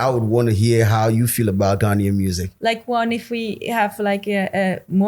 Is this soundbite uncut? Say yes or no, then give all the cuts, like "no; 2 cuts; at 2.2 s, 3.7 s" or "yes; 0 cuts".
no; 1 cut; at 2.5 s